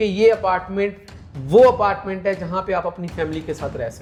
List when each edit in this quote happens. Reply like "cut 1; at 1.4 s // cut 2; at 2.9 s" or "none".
none